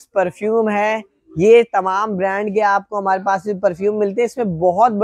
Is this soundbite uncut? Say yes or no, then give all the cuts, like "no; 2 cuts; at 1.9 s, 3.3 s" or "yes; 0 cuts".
yes; 0 cuts